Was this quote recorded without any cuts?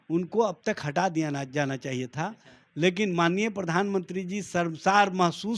yes; 0 cuts

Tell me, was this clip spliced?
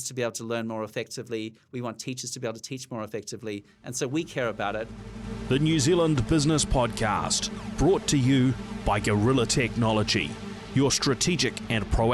yes; 1 cut; at 5.0 s

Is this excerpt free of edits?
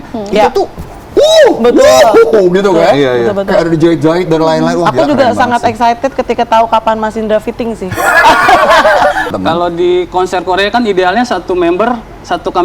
no; 1 cut; at 9.3 s

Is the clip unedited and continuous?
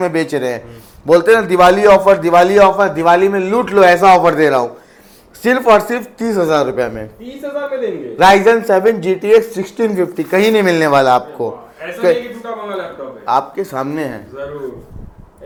yes; 0 cuts

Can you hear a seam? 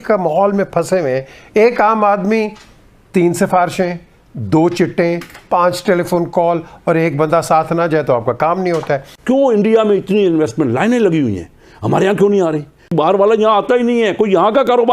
yes; 2 cuts; at 9.1 s, 12.9 s

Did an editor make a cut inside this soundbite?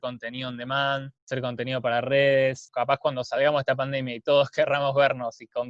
yes; 2 cuts; at 1.1 s, 2.7 s

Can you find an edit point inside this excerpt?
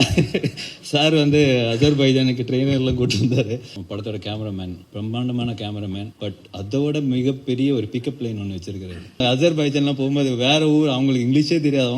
yes; 4 cuts; at 3.8 s, 4.8 s, 6.1 s, 9.2 s

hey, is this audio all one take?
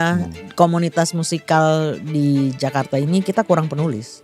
yes; 0 cuts

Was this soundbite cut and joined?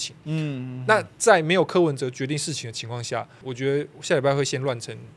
yes; 1 cut; at 3.4 s

